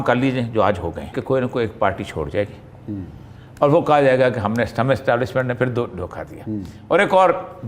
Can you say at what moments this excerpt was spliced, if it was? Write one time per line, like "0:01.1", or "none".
0:01.2